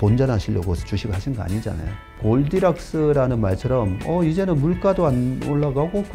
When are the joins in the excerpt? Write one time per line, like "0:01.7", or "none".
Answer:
0:02.1